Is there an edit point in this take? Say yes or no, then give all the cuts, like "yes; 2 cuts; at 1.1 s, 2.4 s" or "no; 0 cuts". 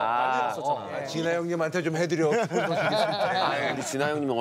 yes; 1 cut; at 1.0 s